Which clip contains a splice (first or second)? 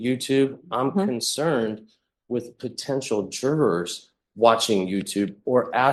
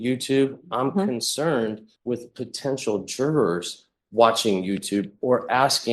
second